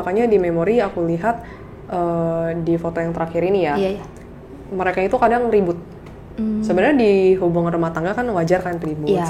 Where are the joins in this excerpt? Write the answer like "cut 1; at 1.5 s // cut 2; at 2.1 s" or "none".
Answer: none